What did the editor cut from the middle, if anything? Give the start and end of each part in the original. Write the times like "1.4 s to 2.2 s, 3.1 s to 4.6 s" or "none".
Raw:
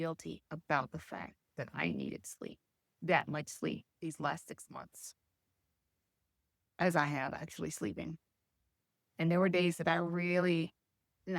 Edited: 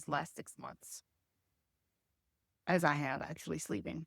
none